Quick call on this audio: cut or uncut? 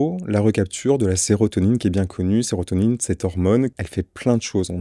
cut